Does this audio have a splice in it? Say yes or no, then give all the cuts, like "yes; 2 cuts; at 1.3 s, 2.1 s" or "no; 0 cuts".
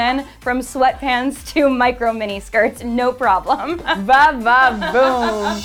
no; 0 cuts